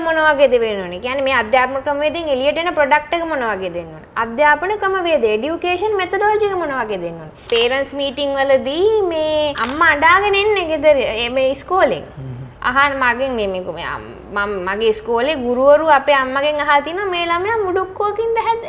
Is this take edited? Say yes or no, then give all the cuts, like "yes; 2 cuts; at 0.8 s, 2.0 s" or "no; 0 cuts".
yes; 2 cuts; at 7.3 s, 9.6 s